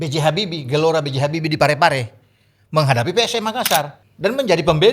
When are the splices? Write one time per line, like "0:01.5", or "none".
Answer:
0:04.0